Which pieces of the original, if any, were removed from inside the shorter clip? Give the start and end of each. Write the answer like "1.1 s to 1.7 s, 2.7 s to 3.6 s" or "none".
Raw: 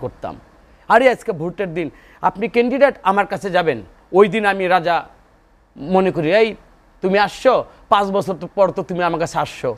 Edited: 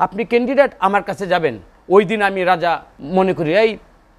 5.2 s to 5.7 s